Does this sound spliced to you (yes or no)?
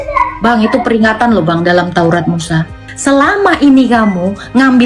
yes